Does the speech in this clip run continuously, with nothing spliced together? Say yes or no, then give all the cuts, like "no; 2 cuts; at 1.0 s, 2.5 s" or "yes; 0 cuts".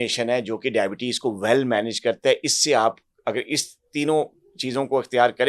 yes; 0 cuts